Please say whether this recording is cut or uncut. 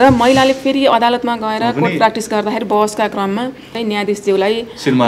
cut